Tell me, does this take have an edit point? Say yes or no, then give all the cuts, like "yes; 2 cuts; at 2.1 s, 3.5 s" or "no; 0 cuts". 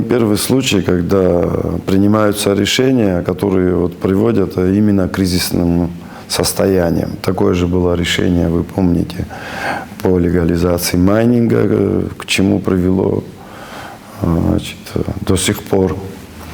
no; 0 cuts